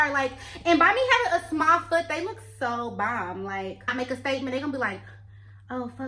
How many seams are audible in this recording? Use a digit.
1